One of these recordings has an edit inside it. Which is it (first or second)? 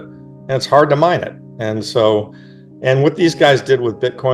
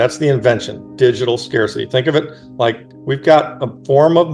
second